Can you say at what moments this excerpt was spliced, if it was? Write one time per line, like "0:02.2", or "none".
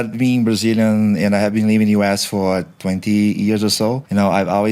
none